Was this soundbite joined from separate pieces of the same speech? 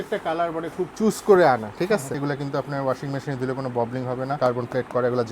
yes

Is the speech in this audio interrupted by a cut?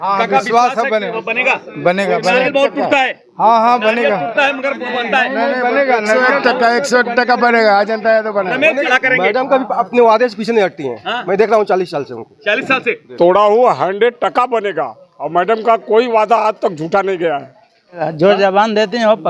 yes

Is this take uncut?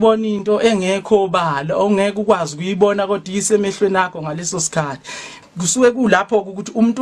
no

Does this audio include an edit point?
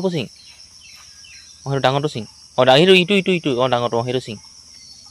no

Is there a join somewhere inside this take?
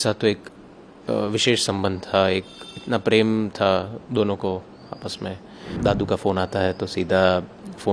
yes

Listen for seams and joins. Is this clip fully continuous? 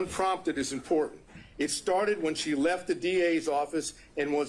yes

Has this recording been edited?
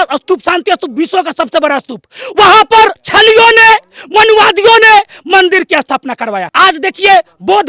yes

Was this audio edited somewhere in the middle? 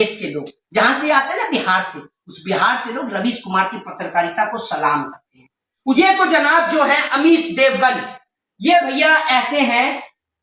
yes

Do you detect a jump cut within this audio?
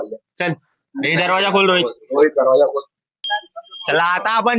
yes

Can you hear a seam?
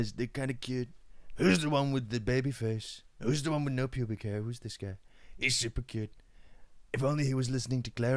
no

